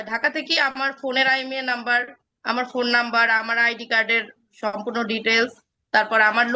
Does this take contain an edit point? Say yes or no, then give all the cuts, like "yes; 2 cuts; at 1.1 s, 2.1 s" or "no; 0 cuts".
no; 0 cuts